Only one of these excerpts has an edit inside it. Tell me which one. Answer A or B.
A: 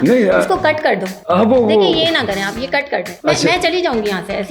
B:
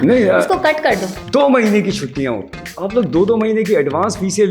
B